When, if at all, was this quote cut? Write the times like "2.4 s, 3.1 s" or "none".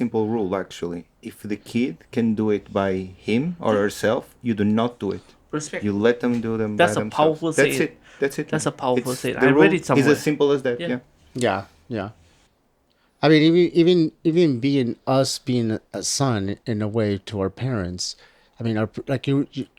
none

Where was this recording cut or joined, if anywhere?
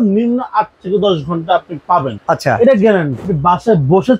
2.1 s, 3.3 s

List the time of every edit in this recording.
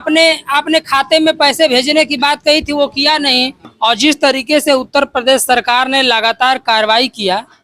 3.7 s

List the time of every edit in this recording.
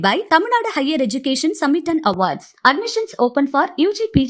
none

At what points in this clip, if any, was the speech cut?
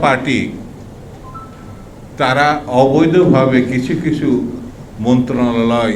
none

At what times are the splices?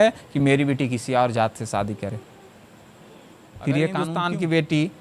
4.1 s

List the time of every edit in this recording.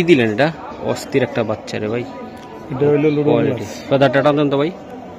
none

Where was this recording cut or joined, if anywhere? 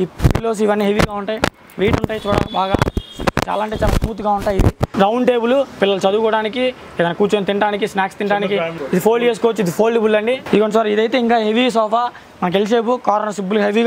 4.8 s, 8.8 s, 10.4 s

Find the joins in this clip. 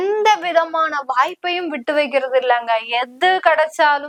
none

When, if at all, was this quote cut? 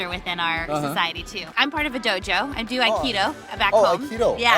1.4 s

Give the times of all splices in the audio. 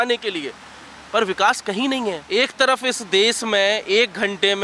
2.2 s

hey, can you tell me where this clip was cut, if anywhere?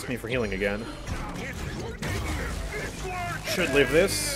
1.1 s

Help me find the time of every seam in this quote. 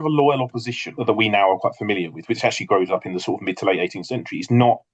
0.9 s

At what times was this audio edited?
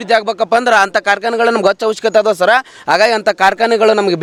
none

